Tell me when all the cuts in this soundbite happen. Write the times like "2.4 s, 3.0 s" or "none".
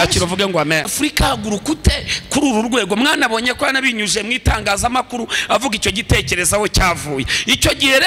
0.9 s